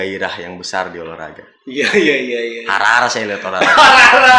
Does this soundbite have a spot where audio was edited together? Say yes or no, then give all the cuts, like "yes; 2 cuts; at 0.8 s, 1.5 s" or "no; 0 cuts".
no; 0 cuts